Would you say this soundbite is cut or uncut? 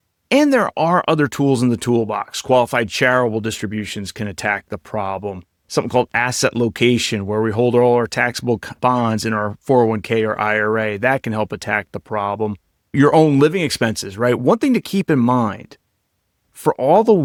uncut